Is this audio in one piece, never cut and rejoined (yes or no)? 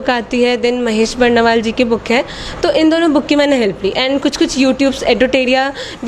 yes